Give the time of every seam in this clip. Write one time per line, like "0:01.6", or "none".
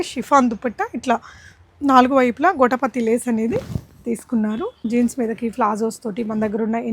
0:04.9